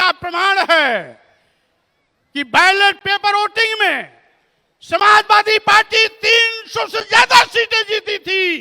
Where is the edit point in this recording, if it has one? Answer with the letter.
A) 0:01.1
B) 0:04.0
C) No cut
C